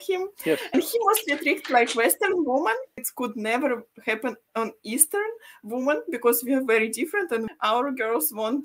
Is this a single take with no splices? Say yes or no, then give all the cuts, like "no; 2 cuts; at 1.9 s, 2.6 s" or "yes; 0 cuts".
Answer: no; 1 cut; at 7.5 s